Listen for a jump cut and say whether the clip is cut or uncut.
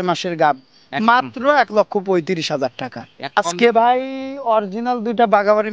cut